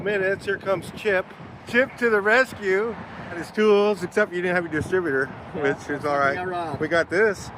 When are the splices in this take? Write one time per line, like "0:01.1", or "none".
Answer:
0:01.5
0:03.5

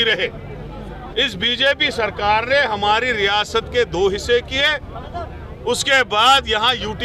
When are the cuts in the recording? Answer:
none

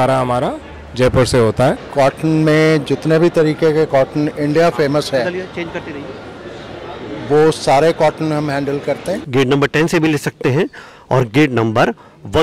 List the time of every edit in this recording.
0:01.8
0:09.2

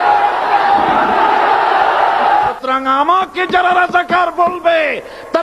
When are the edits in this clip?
0:02.4

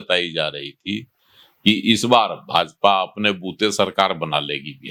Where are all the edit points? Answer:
none

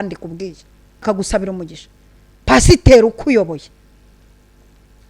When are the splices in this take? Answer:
0:01.0

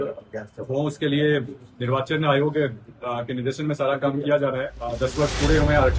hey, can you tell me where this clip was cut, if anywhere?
0:04.8

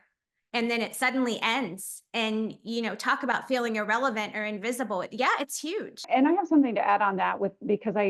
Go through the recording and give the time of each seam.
none

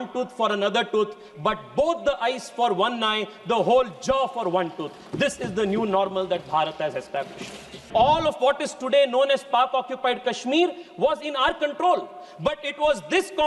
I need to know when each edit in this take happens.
0:07.9

